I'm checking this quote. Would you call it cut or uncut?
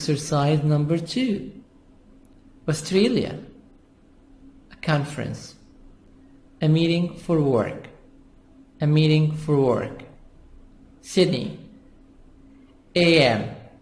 uncut